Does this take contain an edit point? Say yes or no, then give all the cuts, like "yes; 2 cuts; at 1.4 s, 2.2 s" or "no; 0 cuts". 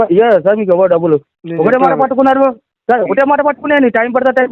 yes; 1 cut; at 1.4 s